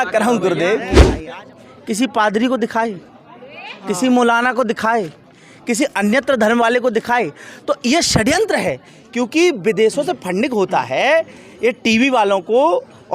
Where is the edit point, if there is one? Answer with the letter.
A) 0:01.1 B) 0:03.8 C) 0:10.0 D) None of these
A